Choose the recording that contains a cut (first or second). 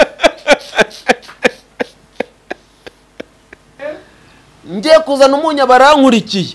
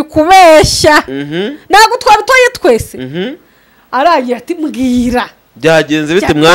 first